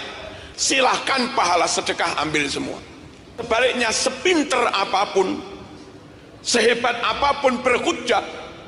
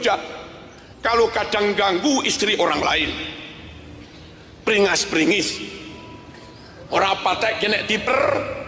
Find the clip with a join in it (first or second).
first